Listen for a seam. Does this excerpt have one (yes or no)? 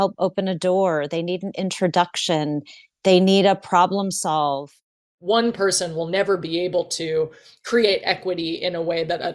yes